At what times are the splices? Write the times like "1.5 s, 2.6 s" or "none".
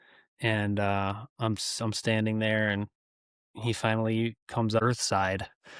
4.8 s